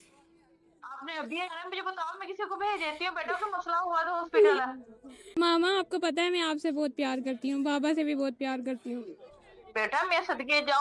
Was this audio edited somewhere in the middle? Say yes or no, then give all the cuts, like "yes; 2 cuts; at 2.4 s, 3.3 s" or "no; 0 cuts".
yes; 1 cut; at 5.3 s